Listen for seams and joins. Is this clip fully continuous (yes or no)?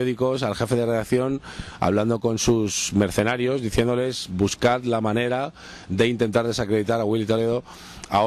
yes